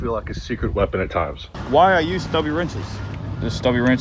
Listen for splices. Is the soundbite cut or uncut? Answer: cut